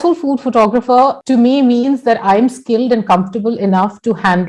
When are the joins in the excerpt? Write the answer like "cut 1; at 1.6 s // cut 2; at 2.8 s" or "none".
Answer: cut 1; at 1.2 s